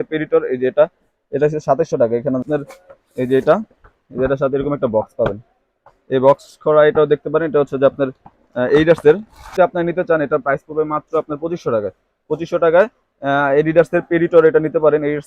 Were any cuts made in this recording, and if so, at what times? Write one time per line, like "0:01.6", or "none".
0:02.4
0:09.4